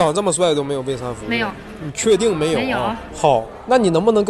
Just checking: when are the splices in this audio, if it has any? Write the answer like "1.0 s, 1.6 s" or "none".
1.3 s, 2.7 s